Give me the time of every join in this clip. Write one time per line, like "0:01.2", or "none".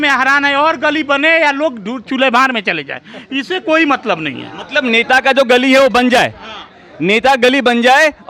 none